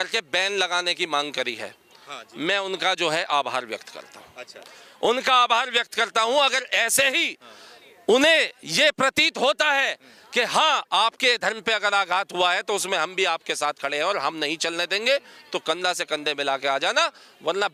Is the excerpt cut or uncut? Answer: uncut